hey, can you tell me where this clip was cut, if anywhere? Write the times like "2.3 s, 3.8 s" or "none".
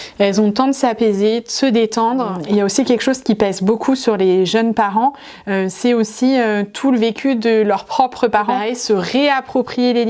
2.4 s, 8.7 s